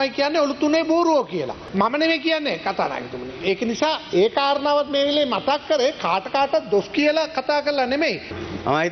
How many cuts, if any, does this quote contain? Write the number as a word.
zero